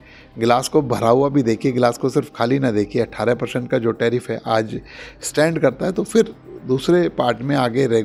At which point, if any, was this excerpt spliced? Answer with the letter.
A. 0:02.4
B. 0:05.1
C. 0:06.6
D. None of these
D